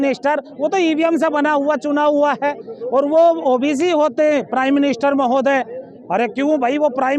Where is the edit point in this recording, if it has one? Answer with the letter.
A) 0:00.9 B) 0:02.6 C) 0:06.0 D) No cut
D